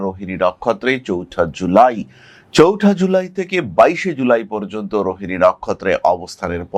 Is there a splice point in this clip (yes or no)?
no